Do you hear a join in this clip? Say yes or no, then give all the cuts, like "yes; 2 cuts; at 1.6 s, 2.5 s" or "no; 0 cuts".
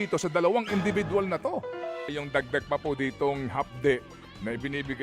yes; 1 cut; at 2.1 s